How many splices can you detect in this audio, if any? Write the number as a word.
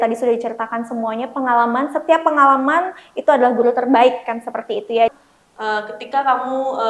one